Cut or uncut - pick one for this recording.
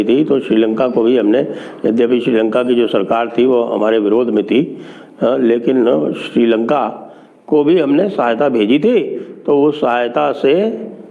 uncut